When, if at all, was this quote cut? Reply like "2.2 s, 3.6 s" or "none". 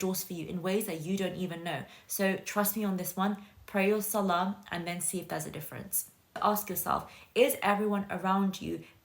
6.4 s

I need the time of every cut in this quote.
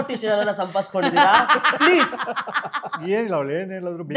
3.0 s

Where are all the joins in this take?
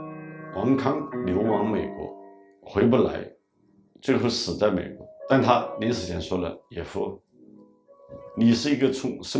4.9 s

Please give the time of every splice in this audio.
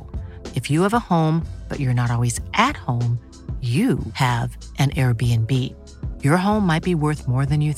none

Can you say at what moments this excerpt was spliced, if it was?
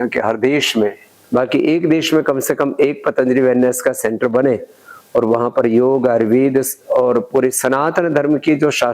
1.1 s

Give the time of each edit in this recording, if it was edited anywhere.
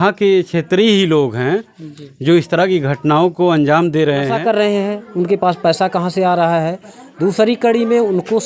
4.3 s

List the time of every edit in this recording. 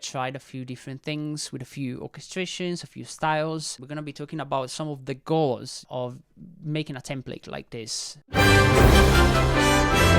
3.8 s, 5.8 s

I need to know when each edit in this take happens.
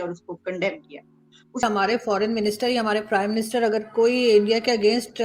1.6 s

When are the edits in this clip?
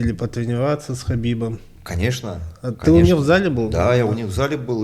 none

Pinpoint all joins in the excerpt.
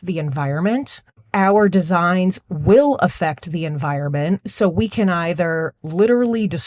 1.0 s

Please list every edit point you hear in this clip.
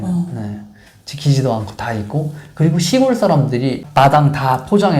none

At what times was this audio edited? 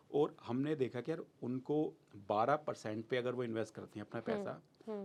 none

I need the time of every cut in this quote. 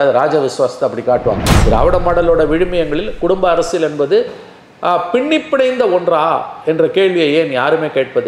1.5 s

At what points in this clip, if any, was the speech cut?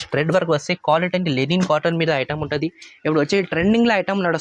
none

